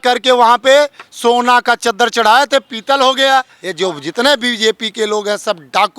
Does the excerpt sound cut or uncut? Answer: cut